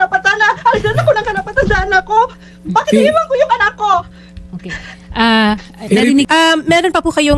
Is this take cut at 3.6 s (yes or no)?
no